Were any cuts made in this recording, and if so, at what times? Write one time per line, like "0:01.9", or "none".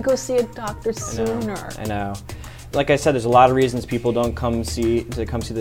0:02.7